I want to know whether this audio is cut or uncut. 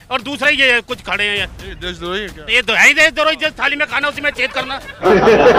uncut